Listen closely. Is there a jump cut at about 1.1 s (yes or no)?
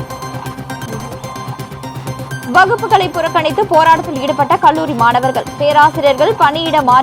yes